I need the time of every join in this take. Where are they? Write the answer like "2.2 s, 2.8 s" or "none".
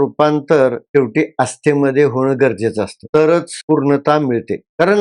3.5 s